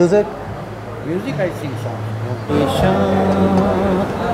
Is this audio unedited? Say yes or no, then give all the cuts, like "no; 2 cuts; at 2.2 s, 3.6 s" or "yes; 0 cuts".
no; 1 cut; at 2.5 s